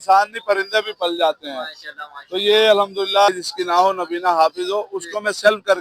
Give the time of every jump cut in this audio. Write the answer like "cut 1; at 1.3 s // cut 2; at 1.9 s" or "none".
cut 1; at 3.3 s